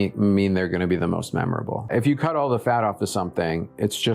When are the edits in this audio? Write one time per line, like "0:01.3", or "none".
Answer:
0:01.9